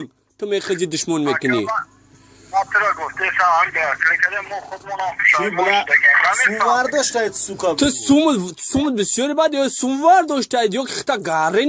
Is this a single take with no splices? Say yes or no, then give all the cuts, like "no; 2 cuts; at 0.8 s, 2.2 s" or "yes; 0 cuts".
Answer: yes; 0 cuts